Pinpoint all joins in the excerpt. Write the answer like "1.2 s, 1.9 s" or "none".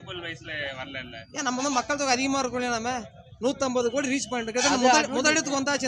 none